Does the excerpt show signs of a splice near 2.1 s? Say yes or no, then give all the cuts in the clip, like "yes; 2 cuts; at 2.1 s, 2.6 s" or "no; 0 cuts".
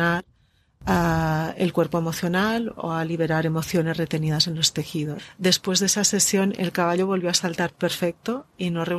no; 1 cut; at 5.1 s